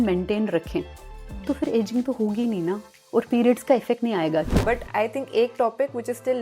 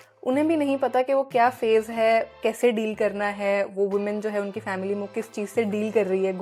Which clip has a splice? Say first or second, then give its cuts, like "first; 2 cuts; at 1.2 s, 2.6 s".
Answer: first; 2 cuts; at 2.9 s, 4.5 s